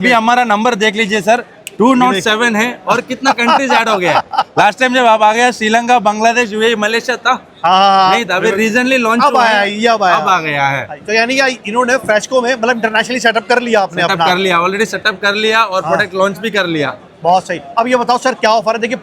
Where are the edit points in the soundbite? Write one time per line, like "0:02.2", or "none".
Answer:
none